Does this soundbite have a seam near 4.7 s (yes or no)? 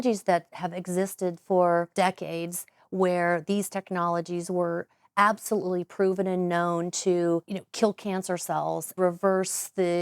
no